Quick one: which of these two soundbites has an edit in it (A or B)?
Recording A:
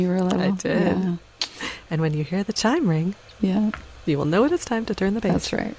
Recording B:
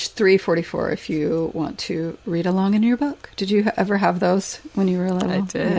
A